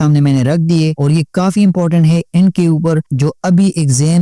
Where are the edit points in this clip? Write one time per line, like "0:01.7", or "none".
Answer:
0:01.0